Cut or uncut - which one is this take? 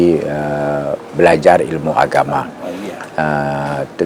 uncut